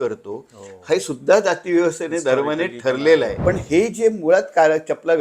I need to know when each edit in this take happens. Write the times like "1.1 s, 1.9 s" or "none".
3.3 s

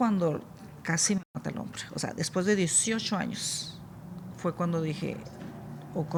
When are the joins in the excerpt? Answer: none

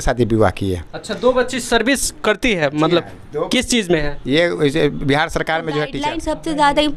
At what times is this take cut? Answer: 6.0 s

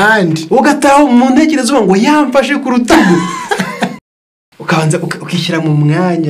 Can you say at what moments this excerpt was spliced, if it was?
3.9 s

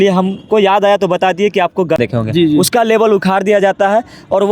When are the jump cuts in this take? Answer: 2.0 s

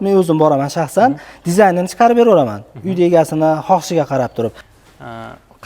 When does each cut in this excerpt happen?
4.7 s

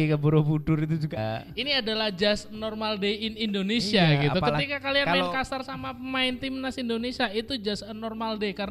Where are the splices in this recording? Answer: 1.2 s

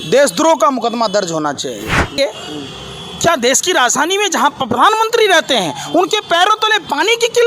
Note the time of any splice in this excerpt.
2.2 s

